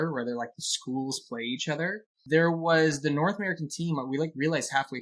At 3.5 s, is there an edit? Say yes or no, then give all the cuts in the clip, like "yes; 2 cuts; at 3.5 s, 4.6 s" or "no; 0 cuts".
no; 1 cut; at 2.1 s